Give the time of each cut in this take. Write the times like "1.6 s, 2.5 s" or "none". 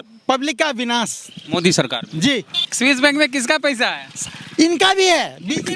2.6 s

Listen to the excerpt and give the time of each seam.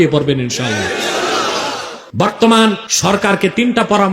2.0 s, 2.9 s

